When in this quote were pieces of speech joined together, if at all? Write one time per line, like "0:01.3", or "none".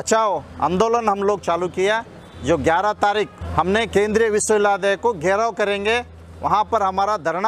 0:03.4